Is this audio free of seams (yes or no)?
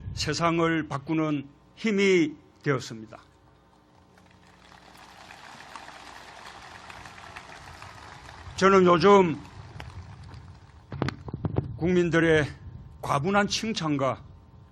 yes